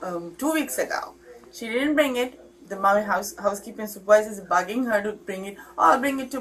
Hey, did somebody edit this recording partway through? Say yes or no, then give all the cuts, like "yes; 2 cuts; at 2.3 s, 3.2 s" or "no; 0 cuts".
no; 0 cuts